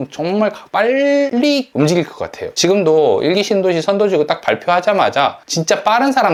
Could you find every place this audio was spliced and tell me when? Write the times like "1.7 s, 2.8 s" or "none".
none